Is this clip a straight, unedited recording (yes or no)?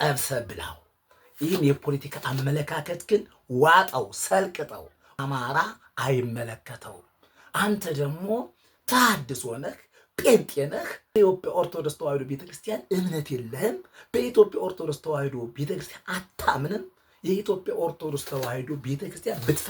no